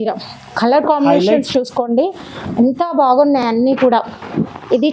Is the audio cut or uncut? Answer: uncut